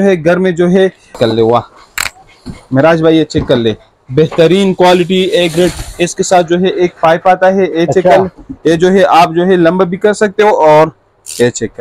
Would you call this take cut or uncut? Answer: cut